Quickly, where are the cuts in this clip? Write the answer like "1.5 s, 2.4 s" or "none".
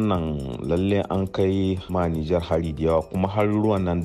1.8 s